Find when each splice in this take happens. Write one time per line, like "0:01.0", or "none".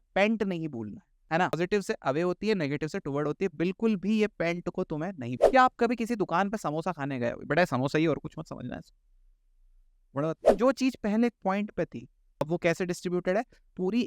0:01.5
0:05.3
0:10.4
0:12.4